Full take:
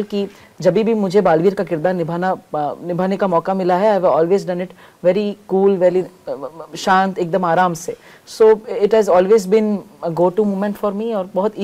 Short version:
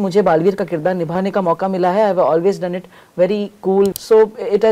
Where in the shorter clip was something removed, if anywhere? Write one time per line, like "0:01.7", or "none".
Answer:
0:01.1
0:03.9